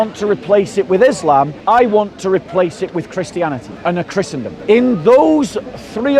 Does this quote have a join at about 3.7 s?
yes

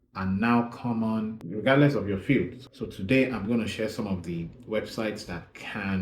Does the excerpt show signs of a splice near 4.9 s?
no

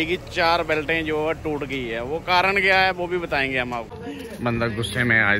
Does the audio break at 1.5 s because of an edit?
no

